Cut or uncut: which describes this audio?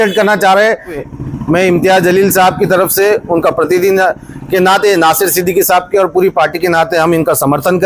cut